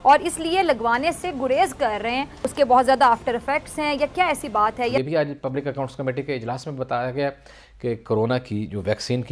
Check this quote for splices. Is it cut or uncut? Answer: cut